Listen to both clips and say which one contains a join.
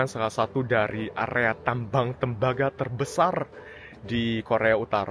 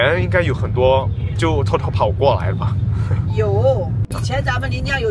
second; 1 cut; at 4.1 s

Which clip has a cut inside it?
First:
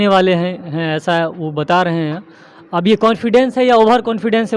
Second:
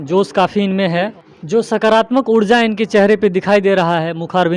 second; 1 cut; at 1.1 s

